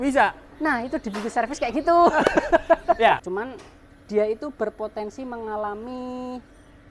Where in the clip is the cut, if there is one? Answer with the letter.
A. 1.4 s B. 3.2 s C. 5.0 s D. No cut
B